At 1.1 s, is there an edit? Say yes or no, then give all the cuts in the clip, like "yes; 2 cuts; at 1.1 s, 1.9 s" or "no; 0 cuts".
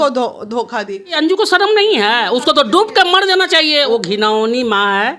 yes; 2 cuts; at 1.1 s, 3.9 s